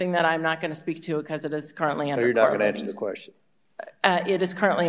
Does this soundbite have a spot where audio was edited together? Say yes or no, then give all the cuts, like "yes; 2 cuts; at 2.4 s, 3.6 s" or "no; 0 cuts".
no; 0 cuts